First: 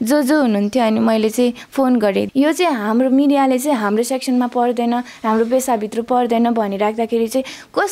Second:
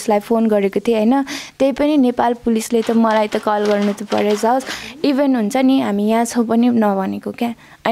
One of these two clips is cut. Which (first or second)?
first